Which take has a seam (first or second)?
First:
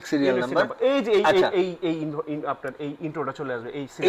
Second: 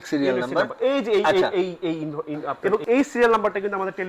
second